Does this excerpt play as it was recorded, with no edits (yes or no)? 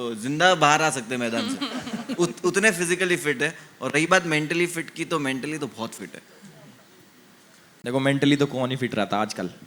yes